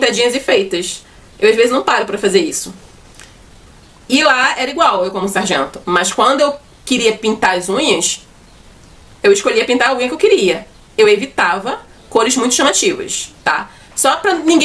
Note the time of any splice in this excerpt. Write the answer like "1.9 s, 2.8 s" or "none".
none

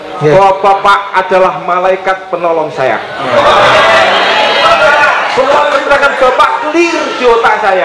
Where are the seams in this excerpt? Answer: 2.6 s

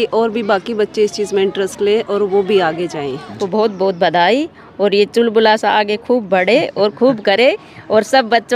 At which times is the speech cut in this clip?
3.3 s

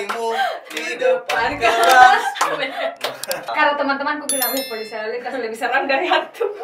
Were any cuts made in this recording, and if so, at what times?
3.5 s

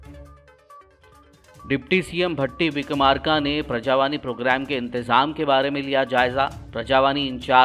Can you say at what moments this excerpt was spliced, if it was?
1.0 s

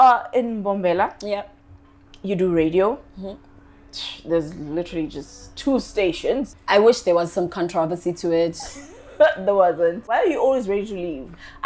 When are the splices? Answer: 6.5 s, 10.1 s

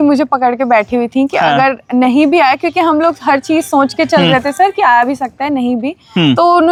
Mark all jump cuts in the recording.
none

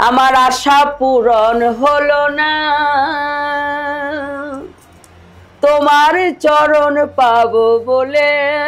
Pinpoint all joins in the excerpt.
none

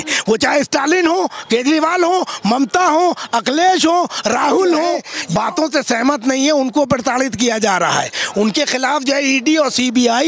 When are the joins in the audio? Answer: 5.1 s

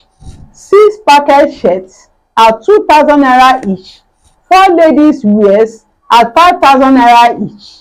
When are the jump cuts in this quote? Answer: none

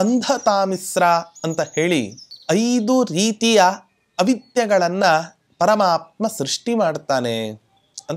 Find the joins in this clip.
none

